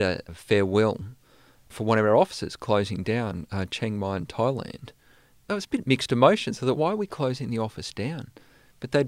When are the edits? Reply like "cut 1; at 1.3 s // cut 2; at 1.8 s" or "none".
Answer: cut 1; at 1.7 s // cut 2; at 5.6 s

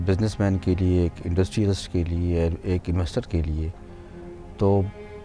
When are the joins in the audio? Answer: none

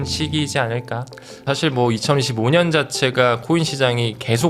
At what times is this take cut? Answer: cut 1; at 1.4 s

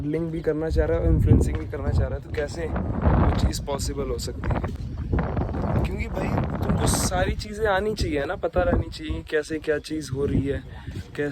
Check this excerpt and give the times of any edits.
none

